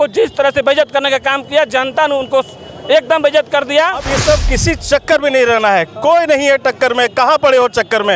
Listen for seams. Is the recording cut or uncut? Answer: cut